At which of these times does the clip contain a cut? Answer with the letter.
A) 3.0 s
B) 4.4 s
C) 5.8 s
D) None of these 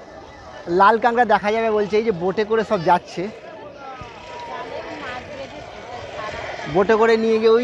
D